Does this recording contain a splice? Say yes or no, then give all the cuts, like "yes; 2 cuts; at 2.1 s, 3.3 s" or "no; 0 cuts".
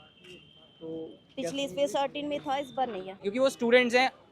yes; 1 cut; at 3.2 s